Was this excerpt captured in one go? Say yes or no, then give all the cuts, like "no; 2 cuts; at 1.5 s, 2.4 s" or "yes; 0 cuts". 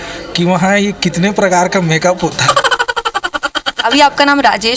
no; 2 cuts; at 2.4 s, 3.8 s